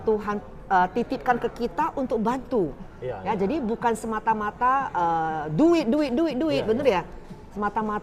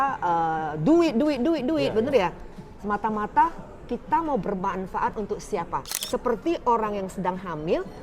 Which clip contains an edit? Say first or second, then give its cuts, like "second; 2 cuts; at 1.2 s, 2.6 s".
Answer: second; 1 cut; at 5.9 s